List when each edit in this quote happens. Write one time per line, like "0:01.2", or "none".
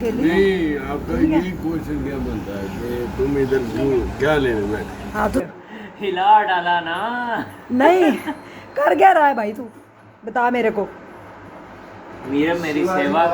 0:05.4